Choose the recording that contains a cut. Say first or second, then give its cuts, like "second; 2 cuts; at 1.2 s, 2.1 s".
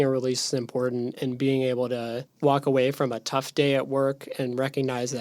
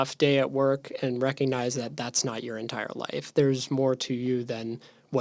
first; 1 cut; at 2.2 s